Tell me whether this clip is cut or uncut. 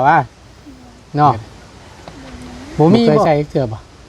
cut